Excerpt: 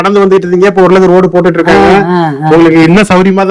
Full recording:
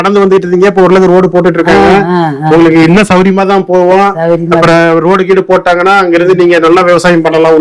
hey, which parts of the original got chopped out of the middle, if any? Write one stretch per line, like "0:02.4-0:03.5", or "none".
none